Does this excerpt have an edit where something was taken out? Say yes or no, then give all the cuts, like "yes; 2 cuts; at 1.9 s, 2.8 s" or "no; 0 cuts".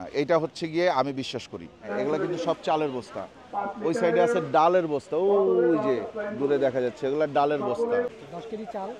yes; 2 cuts; at 1.9 s, 8.1 s